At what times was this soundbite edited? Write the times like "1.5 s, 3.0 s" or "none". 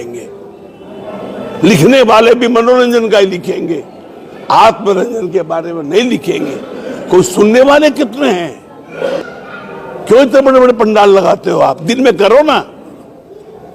9.3 s